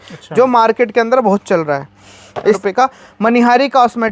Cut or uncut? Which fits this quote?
cut